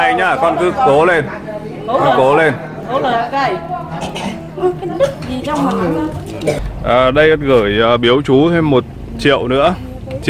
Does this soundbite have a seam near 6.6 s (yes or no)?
yes